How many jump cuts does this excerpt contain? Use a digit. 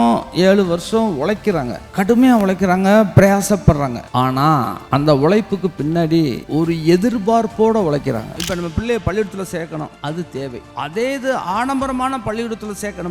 5